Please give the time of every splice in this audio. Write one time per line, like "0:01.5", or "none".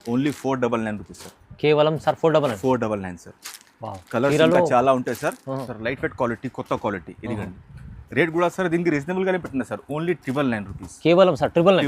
0:05.7